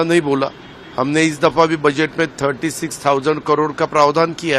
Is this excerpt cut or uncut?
uncut